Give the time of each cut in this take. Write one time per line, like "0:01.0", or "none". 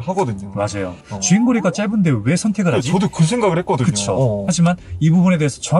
0:01.0
0:04.4